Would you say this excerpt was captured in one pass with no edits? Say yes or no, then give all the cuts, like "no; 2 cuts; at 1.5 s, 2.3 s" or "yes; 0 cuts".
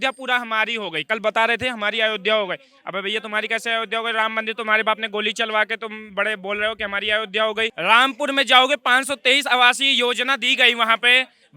no; 2 cuts; at 1.0 s, 7.7 s